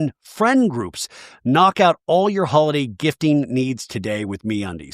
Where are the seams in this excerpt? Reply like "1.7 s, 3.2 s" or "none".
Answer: 1.2 s